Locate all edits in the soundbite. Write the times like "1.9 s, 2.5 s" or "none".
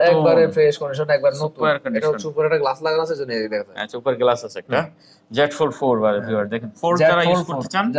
none